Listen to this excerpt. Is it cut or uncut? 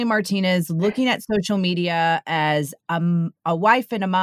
uncut